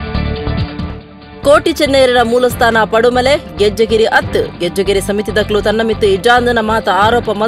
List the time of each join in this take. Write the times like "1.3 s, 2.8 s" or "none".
0.9 s